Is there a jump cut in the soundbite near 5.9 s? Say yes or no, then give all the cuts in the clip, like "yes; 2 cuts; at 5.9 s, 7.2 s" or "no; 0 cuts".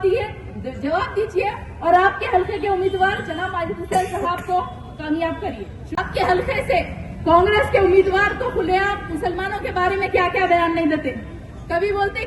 yes; 1 cut; at 5.9 s